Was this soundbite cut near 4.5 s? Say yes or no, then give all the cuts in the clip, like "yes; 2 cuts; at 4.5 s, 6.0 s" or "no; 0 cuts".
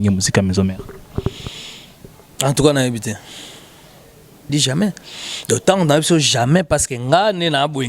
yes; 1 cut; at 4.5 s